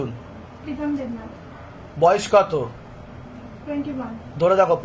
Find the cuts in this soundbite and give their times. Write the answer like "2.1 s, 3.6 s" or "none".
none